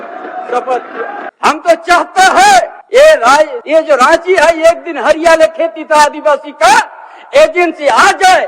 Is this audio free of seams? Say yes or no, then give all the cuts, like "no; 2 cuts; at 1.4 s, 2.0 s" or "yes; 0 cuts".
no; 1 cut; at 1.3 s